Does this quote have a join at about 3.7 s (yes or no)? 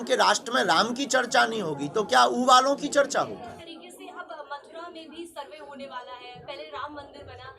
yes